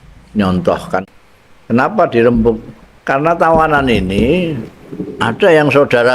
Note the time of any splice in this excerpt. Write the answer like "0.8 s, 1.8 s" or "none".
1.0 s